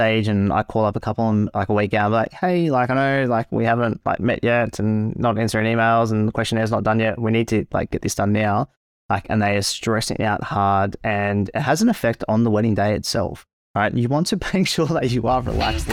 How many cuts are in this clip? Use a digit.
0